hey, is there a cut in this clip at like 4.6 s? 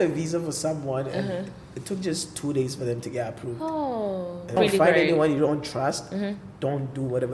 yes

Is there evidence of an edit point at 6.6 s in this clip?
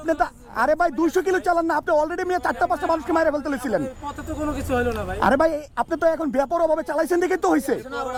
no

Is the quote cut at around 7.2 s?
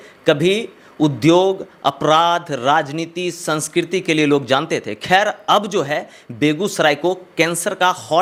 no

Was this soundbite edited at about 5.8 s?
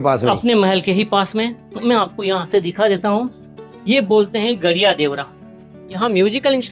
yes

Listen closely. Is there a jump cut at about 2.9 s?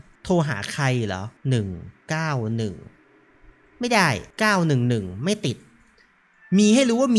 no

